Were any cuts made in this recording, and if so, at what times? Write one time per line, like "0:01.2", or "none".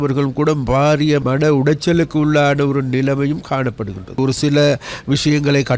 0:01.2
0:04.2